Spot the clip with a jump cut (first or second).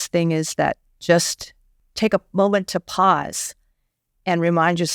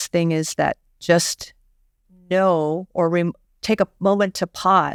first